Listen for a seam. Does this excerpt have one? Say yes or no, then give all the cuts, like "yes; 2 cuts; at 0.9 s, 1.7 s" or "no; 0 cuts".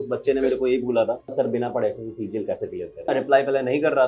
yes; 2 cuts; at 1.3 s, 3.1 s